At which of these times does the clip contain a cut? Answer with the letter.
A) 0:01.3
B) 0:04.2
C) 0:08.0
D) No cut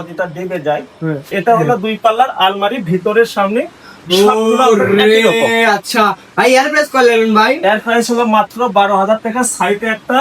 A